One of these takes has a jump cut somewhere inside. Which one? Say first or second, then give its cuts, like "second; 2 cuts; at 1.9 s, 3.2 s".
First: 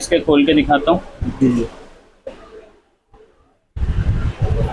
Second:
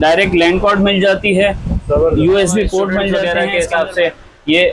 second; 1 cut; at 3.2 s